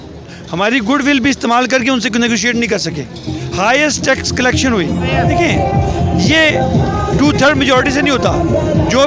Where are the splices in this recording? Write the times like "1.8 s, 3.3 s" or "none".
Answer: 5.1 s